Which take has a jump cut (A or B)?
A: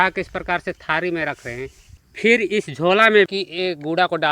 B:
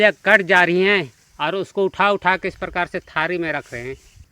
A